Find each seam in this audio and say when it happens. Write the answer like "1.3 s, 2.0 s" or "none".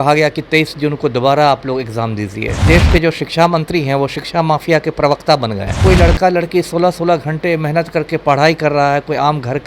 2.6 s, 5.8 s